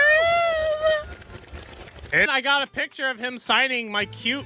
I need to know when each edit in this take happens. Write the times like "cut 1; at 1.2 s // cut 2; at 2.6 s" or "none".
cut 1; at 2.3 s